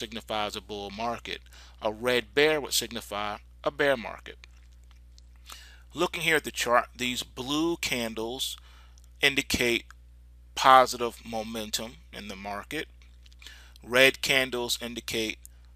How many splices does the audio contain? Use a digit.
1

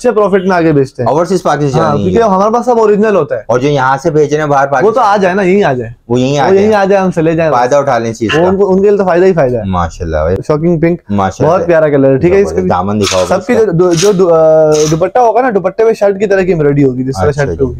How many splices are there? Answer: 1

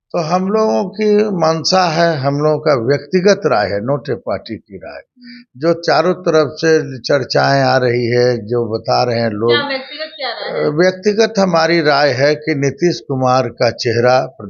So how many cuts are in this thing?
0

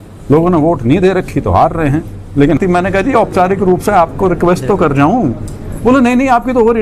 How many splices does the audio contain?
1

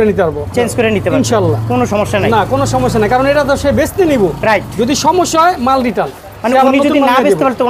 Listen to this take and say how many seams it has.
0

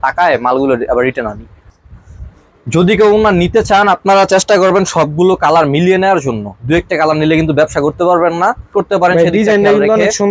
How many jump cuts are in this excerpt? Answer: 2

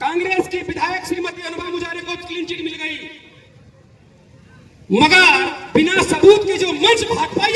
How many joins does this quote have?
0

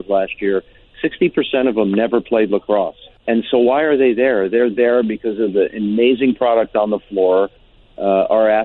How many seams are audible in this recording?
1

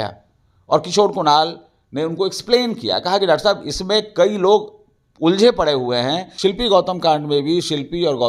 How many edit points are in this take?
1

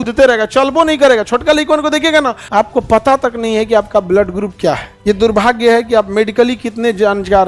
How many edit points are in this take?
2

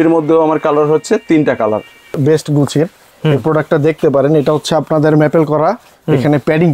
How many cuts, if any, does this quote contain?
1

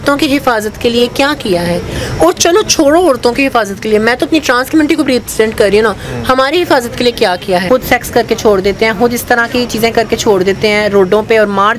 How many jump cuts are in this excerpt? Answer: 1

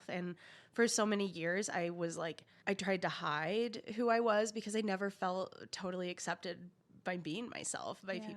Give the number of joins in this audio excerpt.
1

